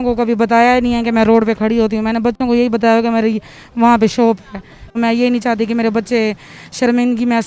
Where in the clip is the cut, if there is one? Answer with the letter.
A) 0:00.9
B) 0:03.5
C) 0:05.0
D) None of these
C